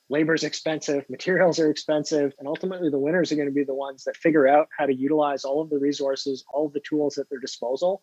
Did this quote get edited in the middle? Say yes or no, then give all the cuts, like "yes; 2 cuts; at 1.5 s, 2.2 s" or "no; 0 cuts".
yes; 1 cut; at 2.4 s